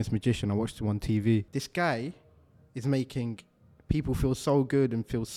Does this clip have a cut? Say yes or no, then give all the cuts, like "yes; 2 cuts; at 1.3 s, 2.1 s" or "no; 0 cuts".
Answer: yes; 1 cut; at 1.6 s